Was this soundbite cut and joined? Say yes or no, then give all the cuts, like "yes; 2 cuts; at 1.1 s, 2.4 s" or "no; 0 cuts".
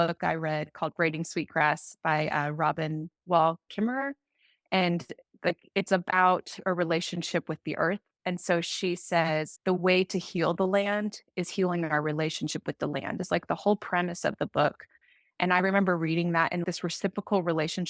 no; 0 cuts